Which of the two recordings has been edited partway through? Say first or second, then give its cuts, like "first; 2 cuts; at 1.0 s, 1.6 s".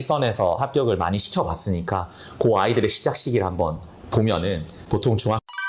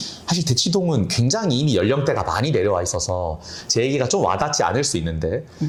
first; 1 cut; at 4.7 s